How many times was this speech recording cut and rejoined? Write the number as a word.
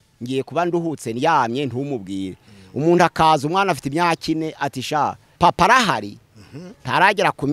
one